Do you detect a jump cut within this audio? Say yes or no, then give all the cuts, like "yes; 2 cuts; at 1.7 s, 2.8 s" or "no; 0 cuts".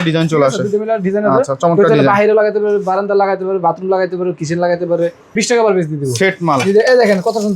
yes; 1 cut; at 5.2 s